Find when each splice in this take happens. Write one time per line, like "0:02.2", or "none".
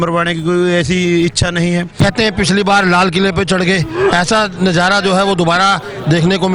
0:02.0